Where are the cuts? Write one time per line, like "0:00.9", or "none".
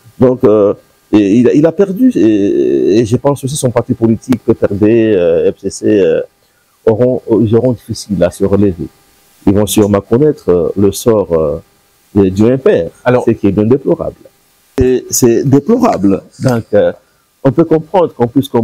0:14.8